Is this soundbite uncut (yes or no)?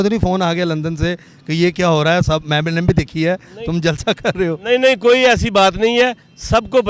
yes